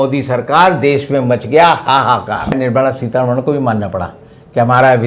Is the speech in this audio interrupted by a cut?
yes; 1 cut; at 2.6 s

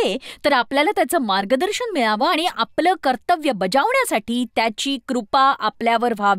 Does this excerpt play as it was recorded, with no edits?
yes; 0 cuts

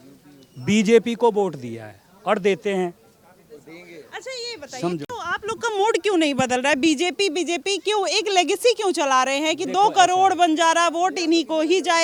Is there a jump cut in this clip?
no; 0 cuts

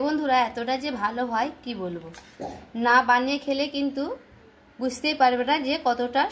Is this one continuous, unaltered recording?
yes; 0 cuts

